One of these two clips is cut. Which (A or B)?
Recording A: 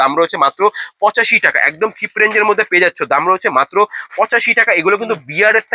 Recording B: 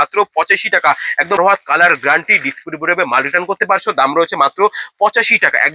B